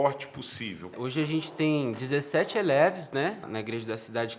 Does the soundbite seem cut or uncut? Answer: cut